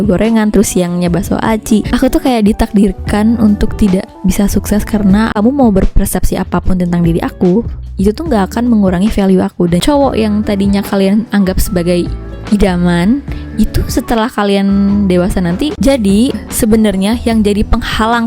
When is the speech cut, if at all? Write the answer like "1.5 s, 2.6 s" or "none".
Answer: 1.9 s, 5.3 s, 9.8 s, 15.7 s

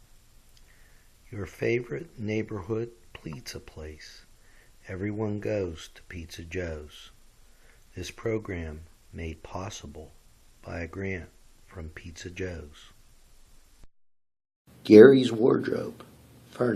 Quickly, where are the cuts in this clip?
13.9 s

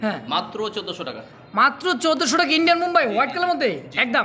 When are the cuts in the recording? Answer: none

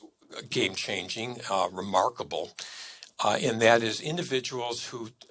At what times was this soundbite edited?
none

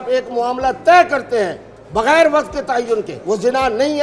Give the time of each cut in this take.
3.1 s

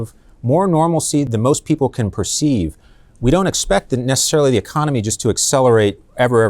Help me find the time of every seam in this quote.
1.3 s

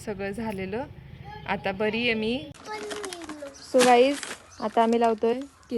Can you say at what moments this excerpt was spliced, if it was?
2.6 s

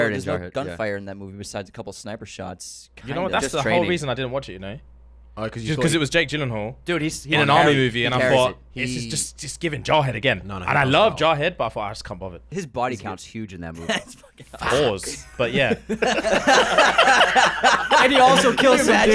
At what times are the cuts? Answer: 12.4 s

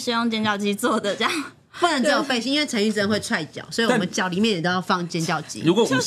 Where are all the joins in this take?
none

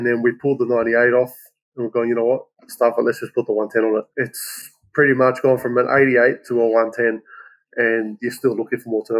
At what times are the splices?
4.1 s

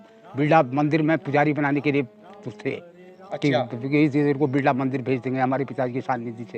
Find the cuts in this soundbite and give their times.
none

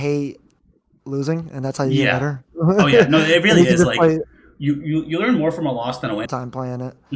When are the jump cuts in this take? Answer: 6.2 s

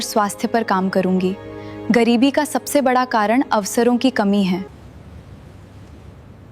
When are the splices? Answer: 4.7 s

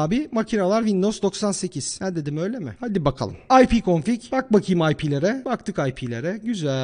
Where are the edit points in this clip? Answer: none

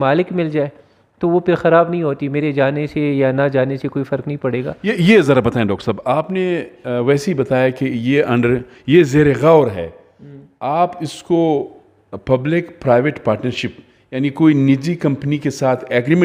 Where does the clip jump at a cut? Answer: none

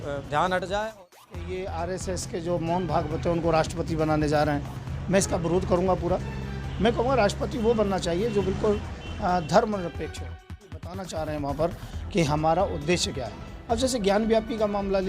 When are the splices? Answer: 1.0 s, 10.8 s

